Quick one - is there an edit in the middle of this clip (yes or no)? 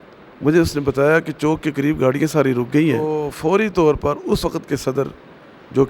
yes